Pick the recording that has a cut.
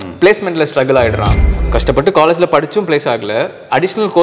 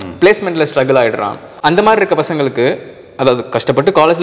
first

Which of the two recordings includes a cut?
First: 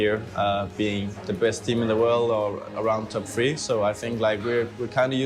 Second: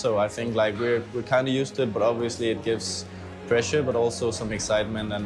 first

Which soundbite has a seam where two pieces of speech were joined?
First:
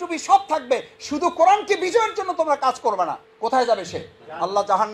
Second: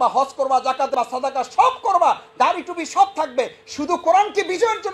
second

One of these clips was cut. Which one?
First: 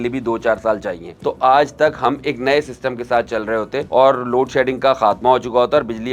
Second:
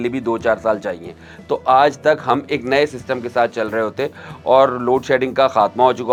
first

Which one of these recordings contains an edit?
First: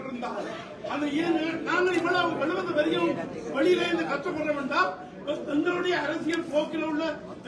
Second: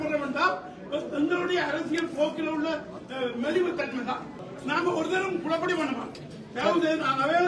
second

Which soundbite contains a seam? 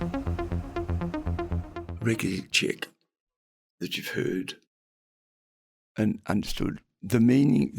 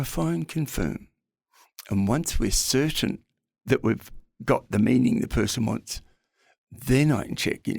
first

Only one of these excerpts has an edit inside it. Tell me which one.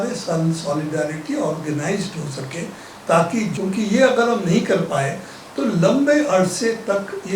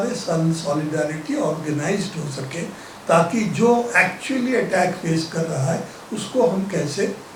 first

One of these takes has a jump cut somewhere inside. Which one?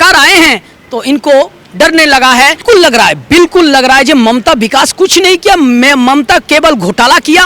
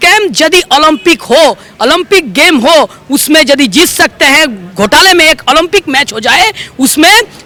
first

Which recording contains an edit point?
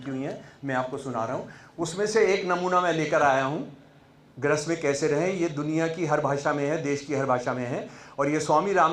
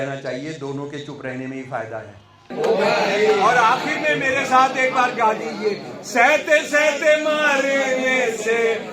second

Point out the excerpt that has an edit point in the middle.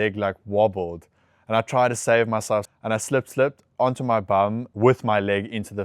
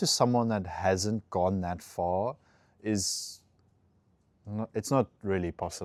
first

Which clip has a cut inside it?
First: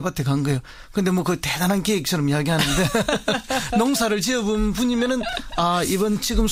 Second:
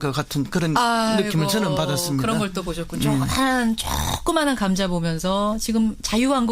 second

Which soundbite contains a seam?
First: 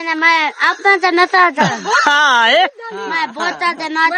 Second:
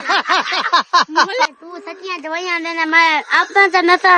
second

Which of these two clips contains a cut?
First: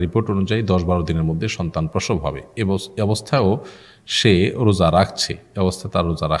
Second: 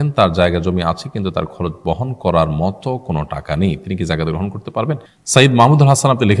second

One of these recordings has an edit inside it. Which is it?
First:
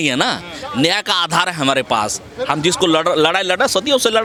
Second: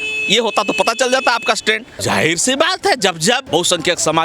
second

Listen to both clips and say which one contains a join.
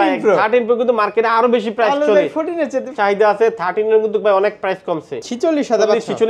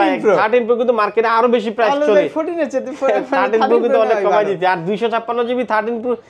first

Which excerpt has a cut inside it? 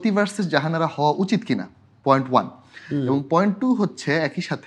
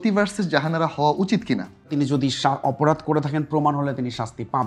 second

